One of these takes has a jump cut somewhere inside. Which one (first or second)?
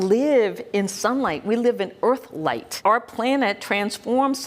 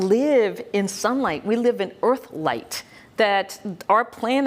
first